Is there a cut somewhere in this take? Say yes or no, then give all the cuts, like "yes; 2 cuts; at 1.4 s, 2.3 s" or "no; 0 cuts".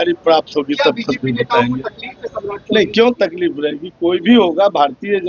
no; 0 cuts